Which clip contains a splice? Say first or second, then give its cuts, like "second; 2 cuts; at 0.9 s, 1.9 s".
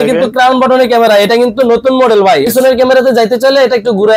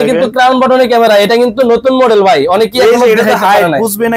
first; 1 cut; at 2.5 s